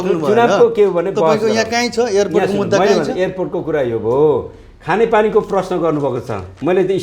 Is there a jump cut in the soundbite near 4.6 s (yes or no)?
no